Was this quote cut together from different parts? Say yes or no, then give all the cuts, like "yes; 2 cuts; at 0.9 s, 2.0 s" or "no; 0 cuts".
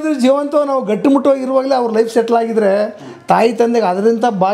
no; 0 cuts